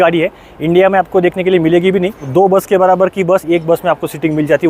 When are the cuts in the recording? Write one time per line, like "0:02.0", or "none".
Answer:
0:02.2

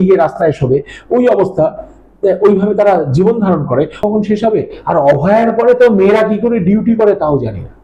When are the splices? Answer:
0:04.0

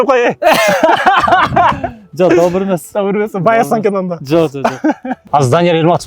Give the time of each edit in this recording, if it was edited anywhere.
0:05.1

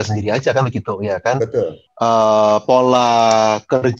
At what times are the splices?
0:01.8

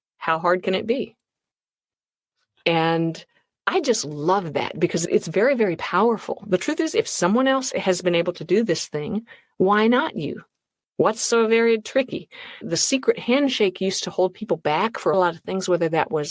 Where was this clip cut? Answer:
0:05.0
0:07.7
0:12.6
0:15.1

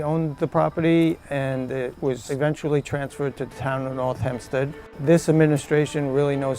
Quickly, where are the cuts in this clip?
0:02.2
0:04.9

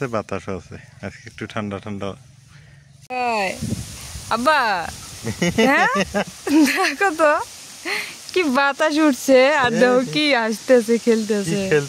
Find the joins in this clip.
0:03.1

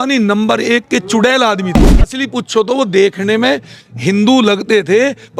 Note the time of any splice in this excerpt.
0:02.1

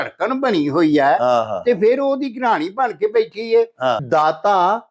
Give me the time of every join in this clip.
0:04.0

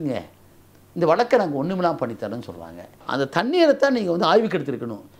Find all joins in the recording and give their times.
0:03.0

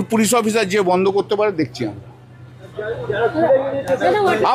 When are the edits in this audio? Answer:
none

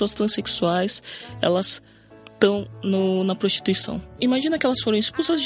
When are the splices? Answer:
0:04.1

